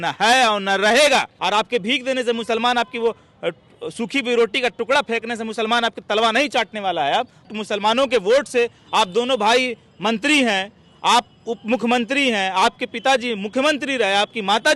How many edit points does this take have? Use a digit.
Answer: 2